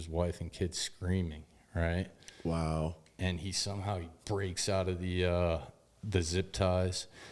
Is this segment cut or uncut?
uncut